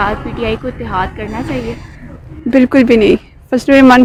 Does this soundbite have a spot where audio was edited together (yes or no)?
no